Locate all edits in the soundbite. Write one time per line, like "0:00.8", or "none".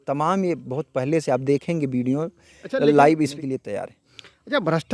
0:03.3

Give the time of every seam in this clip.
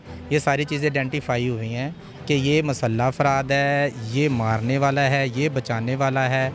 none

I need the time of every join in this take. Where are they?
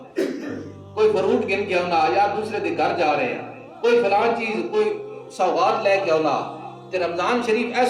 none

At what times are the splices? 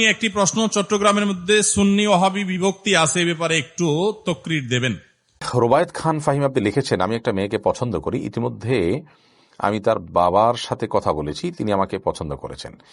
0:05.5

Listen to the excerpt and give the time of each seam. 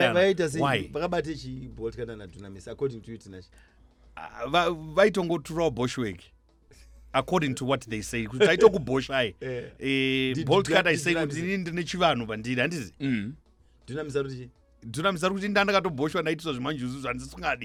none

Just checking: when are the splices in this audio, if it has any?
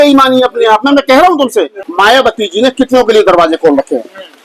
0:01.8

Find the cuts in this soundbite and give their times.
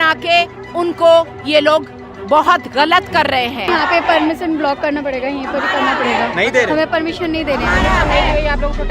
0:03.7

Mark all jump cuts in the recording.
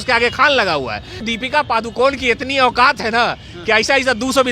0:01.2

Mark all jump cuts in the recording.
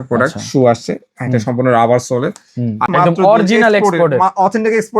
0:02.9

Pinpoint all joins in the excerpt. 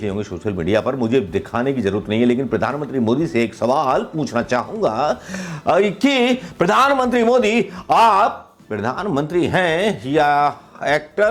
none

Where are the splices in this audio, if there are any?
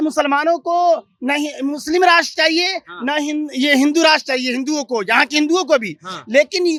none

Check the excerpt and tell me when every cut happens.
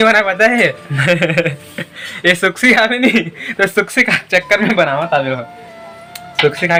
none

